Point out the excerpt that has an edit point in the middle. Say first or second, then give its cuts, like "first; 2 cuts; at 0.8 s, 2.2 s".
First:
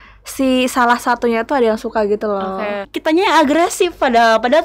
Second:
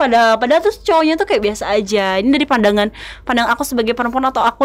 first; 1 cut; at 2.9 s